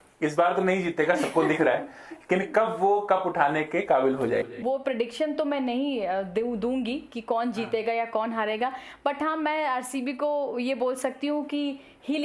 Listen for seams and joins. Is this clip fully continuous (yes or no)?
no